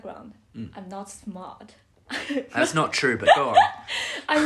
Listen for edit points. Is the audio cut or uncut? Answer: uncut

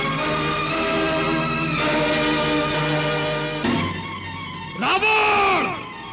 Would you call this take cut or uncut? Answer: cut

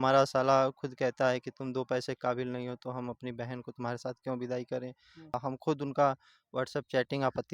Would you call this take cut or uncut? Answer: cut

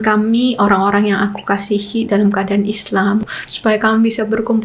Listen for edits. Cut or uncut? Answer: cut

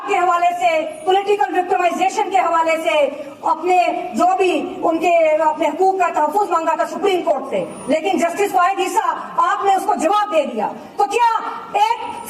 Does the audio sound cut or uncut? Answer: uncut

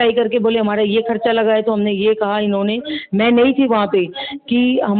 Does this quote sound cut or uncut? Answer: uncut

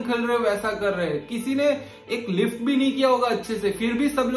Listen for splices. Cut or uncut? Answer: uncut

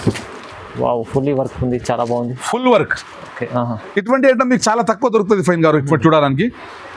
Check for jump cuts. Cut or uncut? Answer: uncut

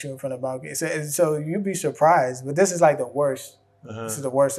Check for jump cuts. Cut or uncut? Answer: uncut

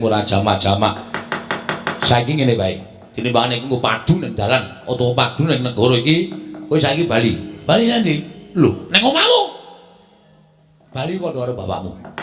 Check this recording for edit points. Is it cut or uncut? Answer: uncut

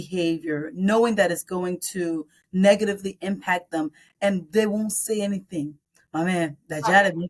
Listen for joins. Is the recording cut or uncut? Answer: uncut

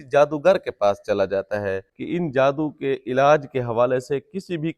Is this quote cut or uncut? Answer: cut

